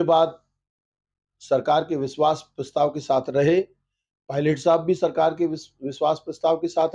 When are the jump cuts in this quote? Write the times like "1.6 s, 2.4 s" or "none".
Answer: none